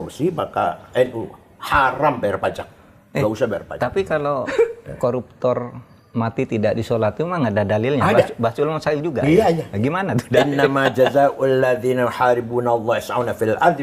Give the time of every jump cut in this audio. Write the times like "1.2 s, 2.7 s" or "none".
none